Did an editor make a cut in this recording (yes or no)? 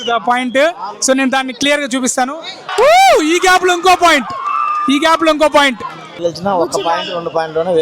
yes